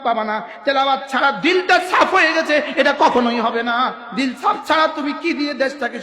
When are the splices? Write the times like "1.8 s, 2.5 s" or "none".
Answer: 4.0 s